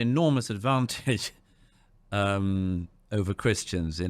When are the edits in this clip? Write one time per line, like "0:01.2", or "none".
none

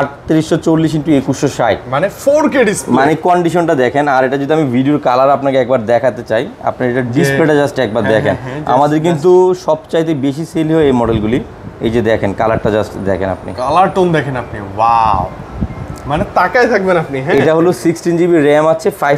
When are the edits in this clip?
none

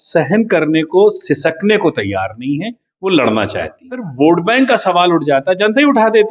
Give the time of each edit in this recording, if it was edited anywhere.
0:04.0

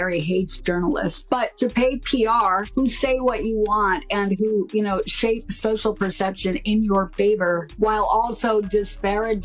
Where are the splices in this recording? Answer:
none

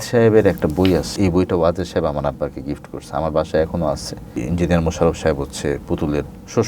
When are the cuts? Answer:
0:01.1
0:04.4

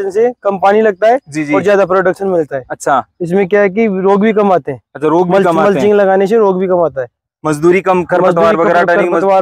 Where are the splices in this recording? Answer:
none

